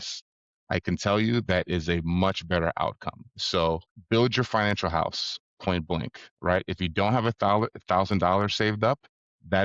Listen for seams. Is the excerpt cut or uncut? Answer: cut